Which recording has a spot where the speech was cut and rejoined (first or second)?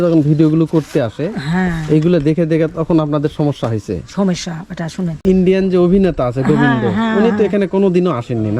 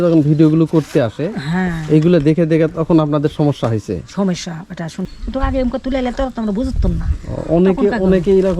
first